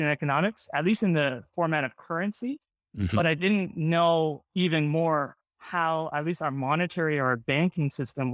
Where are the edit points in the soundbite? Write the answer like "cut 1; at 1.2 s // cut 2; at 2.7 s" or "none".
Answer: none